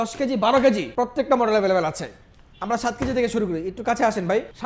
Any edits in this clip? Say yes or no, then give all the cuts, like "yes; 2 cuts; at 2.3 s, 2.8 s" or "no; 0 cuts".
no; 0 cuts